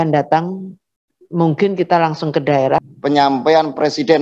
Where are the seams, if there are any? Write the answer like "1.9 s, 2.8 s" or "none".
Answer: 2.8 s